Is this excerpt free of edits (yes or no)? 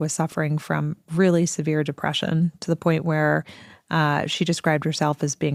yes